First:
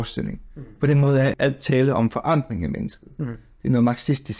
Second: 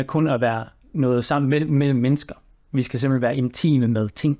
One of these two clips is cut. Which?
first; 1 cut; at 1.3 s

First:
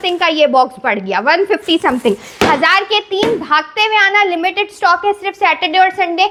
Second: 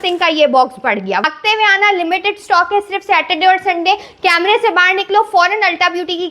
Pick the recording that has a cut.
second; 1 cut; at 1.2 s

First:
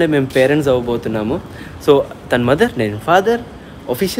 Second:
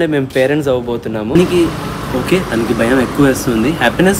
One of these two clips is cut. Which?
second; 1 cut; at 1.3 s

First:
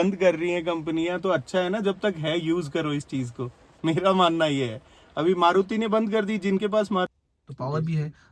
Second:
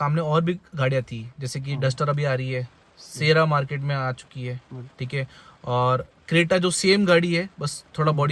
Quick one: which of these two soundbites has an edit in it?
first; 1 cut; at 7.1 s

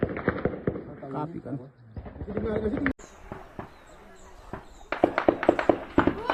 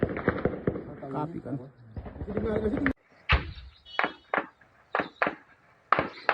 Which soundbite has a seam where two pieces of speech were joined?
second; 1 cut; at 3.1 s

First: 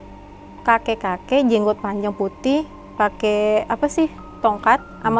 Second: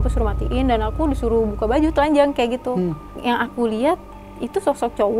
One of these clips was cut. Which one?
second; 1 cut; at 3.2 s

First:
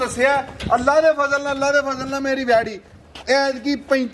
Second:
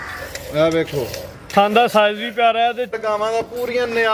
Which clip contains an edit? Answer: second; 1 cut; at 3.0 s

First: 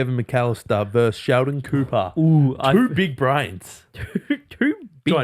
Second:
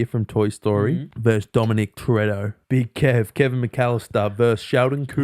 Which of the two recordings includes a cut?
second; 2 cuts; at 1.1 s, 2.5 s

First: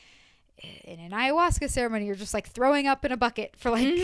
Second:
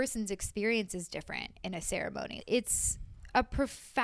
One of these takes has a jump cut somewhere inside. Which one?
second; 1 cut; at 2.4 s

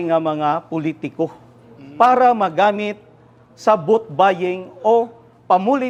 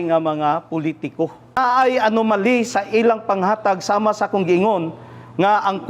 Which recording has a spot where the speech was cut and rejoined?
second; 1 cut; at 1.6 s

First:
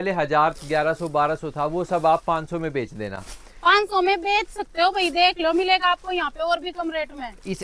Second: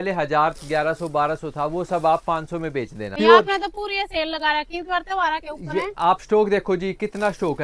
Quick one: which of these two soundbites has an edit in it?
second; 1 cut; at 3.0 s

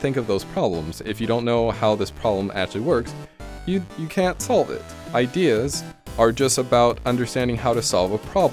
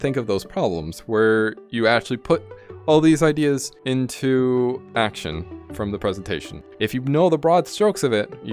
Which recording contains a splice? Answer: second; 4 cuts; at 1.0 s, 3.7 s, 4.8 s, 6.7 s

